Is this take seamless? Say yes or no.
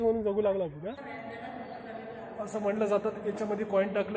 no